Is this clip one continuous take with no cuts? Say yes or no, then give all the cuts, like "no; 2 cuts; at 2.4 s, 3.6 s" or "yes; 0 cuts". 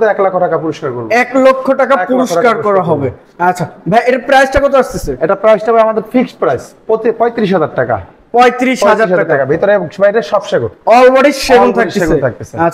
yes; 0 cuts